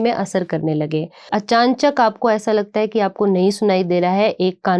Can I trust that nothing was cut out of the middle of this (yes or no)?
no